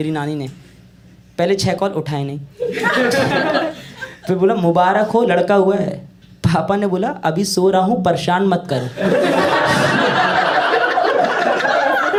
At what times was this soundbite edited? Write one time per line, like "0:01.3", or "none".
none

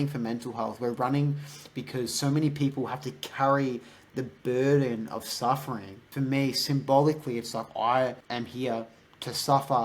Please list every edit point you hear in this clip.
0:06.0
0:08.2

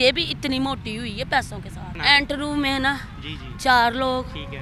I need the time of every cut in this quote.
0:02.0

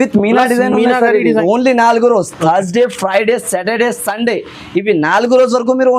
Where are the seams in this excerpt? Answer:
0:01.2

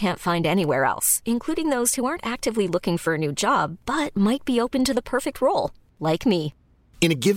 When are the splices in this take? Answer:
none

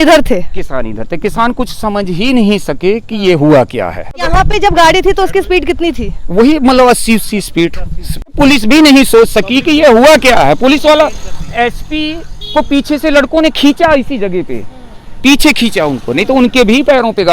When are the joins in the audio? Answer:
0:04.3
0:08.3

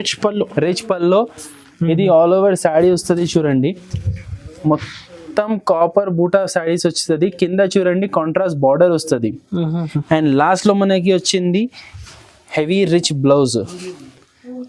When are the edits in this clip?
none

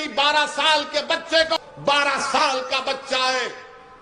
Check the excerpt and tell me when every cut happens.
0:01.6

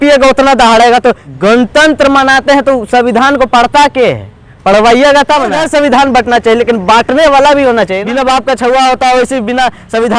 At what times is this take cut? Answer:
0:01.3
0:05.6
0:08.0

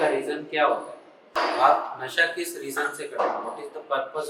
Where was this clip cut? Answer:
0:01.3

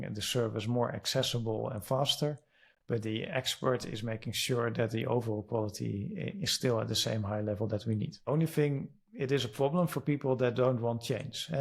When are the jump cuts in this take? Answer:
0:08.2

